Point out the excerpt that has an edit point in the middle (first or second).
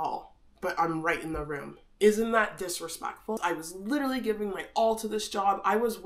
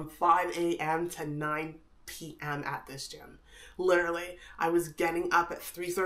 first